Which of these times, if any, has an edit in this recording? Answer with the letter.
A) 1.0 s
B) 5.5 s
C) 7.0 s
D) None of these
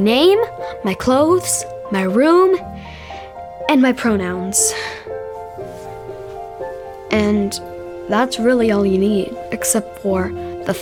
D